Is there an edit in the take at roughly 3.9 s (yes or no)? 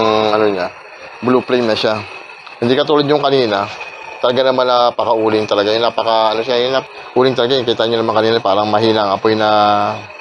no